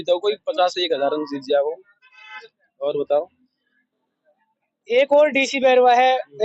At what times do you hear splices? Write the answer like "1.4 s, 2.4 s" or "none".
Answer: none

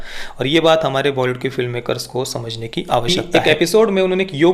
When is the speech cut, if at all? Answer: 3.1 s

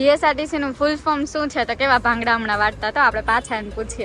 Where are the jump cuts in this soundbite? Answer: none

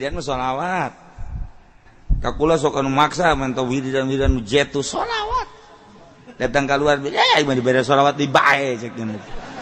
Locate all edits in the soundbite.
none

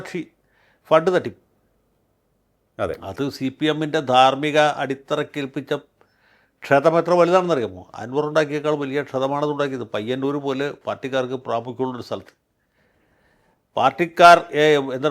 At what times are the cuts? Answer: none

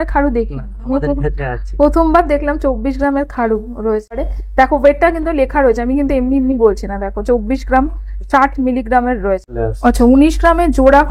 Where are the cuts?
4.3 s, 9.6 s

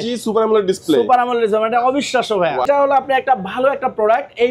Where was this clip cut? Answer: 2.6 s

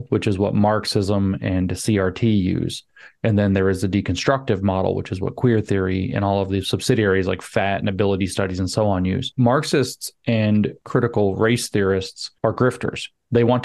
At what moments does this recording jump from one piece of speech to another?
9.3 s, 10.8 s, 12.2 s

